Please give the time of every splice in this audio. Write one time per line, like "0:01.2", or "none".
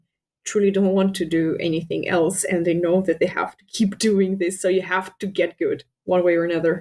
0:05.9